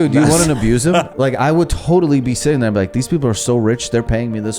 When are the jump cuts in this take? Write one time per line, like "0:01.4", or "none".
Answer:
none